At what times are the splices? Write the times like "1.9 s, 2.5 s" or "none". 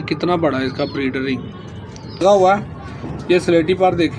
2.2 s